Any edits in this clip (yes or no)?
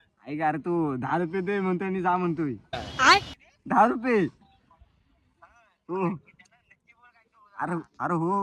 no